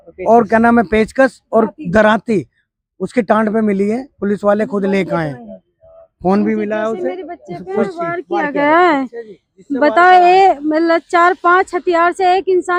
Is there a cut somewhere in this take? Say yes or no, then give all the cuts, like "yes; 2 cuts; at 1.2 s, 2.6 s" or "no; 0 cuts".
no; 0 cuts